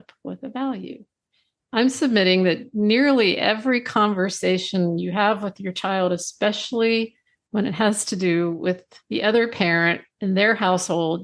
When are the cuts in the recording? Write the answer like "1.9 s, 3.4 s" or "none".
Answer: 8.9 s, 10.1 s